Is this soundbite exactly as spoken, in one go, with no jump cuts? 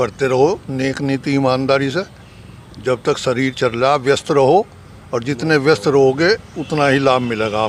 yes; 0 cuts

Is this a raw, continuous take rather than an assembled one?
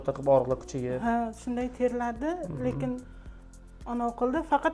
yes; 0 cuts

